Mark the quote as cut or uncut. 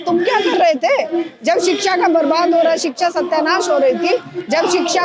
uncut